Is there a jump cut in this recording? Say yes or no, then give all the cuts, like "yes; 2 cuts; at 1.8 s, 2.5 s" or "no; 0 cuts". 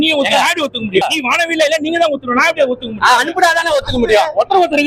no; 0 cuts